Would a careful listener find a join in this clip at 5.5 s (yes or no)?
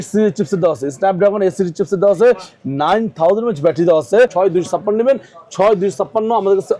no